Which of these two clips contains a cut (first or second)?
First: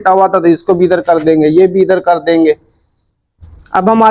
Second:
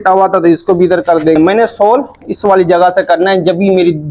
second